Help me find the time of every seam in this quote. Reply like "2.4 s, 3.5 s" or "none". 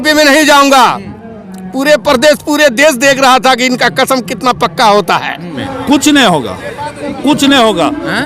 5.6 s